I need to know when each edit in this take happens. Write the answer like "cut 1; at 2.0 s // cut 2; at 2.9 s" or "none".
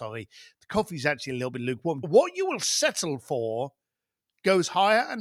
cut 1; at 2.0 s